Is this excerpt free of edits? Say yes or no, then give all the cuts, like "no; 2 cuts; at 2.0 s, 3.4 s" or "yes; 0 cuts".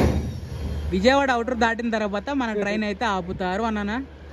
yes; 0 cuts